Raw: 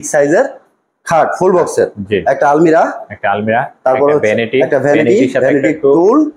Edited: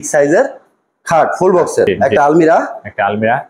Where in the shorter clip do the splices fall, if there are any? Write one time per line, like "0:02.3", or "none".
0:01.9